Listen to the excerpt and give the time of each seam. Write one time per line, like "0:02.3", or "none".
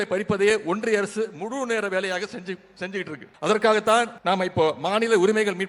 0:03.2
0:04.1